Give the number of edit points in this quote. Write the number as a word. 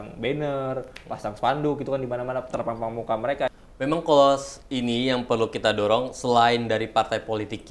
one